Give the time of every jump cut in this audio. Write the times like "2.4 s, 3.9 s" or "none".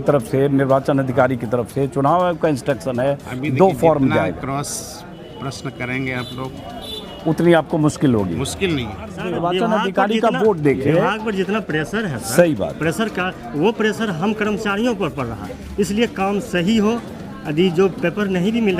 9.1 s